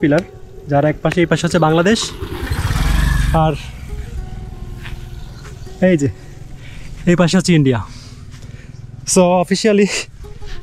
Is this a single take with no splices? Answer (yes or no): yes